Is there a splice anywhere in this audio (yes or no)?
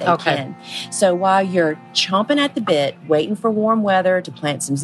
no